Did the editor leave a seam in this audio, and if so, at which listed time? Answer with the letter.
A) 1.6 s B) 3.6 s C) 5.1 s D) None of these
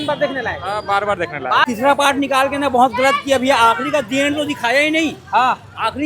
A